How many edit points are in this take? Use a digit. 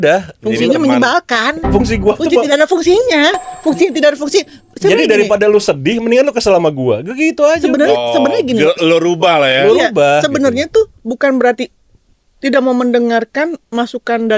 0